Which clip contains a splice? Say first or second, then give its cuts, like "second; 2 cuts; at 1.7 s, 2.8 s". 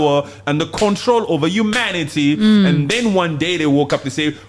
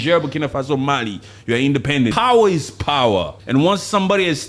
second; 2 cuts; at 2.1 s, 3.4 s